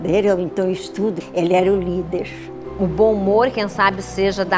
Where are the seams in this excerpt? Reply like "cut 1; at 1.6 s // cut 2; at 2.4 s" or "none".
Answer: cut 1; at 1.2 s // cut 2; at 3.0 s